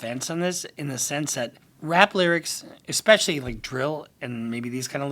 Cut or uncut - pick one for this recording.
cut